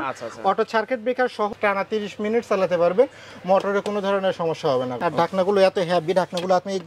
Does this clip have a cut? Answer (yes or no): yes